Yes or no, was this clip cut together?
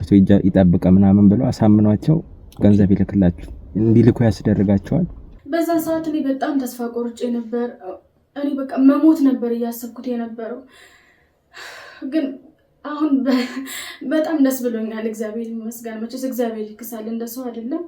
yes